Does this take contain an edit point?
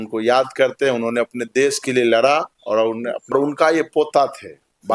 yes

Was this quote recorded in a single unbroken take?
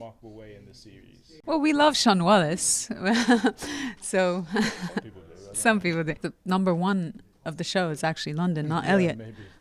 no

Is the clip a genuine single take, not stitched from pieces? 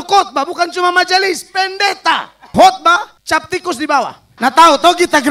no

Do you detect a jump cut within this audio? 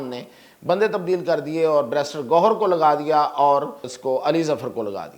yes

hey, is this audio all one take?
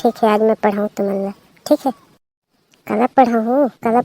no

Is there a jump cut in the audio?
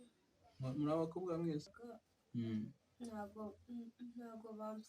yes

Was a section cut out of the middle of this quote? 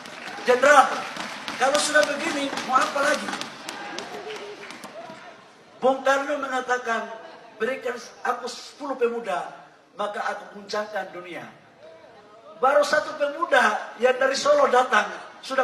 no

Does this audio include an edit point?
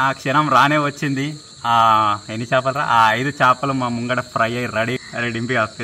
no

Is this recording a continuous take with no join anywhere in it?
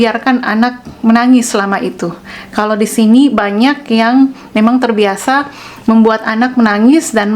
yes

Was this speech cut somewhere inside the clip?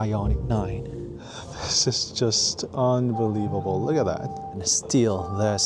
yes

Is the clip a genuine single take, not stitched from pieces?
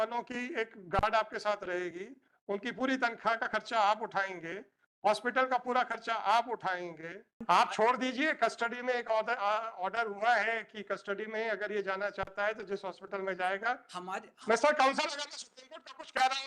no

